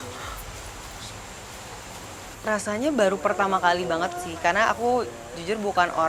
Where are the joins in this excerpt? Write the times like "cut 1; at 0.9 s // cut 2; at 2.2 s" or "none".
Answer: none